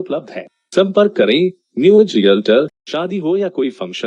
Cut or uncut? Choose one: cut